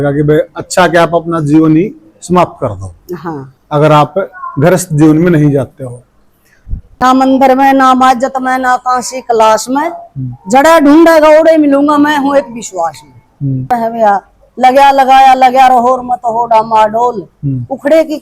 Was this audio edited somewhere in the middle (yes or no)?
yes